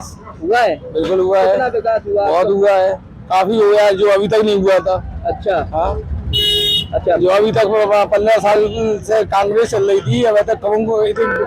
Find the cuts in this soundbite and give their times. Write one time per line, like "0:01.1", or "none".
none